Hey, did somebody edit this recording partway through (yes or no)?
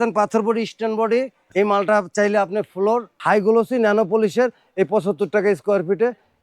yes